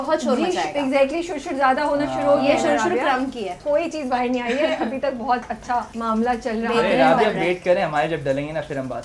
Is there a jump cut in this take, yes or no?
yes